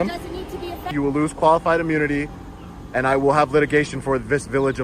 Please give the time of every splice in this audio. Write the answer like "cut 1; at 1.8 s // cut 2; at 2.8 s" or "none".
cut 1; at 0.9 s